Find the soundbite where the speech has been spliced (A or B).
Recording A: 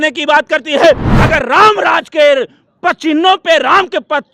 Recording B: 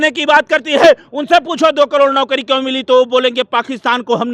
A